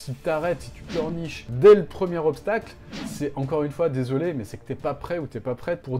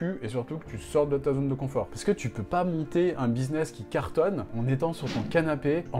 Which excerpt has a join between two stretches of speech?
second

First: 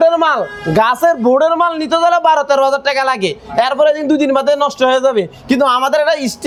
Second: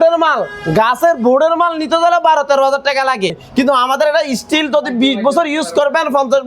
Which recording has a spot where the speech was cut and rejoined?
second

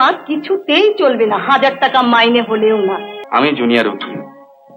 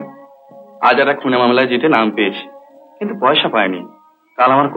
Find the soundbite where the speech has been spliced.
first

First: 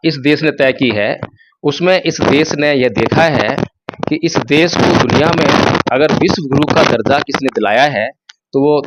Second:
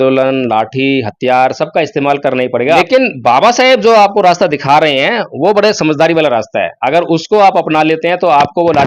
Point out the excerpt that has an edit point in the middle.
second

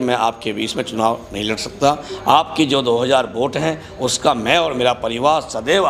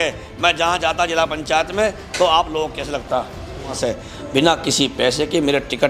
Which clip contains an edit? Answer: second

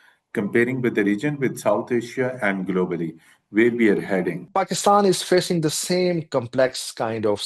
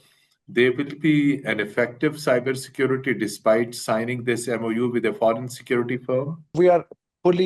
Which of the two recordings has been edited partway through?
second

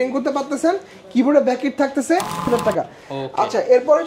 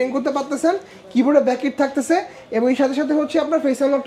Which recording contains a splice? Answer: first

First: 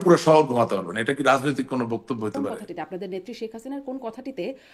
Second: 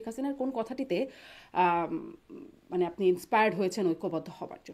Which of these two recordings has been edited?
first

